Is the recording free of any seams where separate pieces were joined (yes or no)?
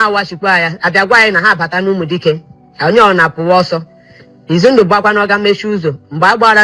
yes